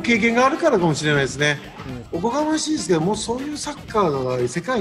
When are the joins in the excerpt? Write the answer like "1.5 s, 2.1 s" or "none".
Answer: 2.0 s